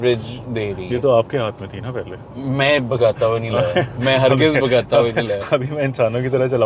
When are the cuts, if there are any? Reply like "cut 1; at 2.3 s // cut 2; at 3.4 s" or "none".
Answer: none